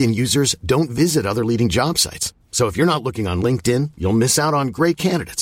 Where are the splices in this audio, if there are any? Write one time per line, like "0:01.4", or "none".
none